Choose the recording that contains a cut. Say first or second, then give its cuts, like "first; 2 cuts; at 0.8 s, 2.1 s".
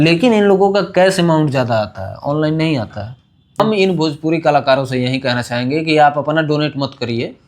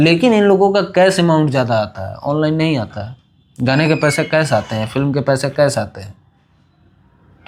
first; 1 cut; at 3.6 s